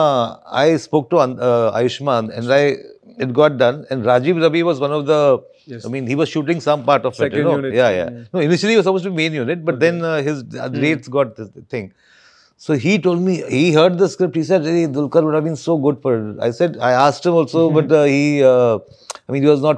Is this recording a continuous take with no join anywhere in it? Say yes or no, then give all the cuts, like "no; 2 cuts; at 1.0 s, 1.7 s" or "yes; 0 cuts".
yes; 0 cuts